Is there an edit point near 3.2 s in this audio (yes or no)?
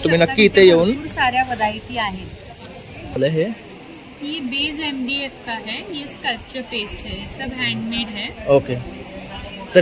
yes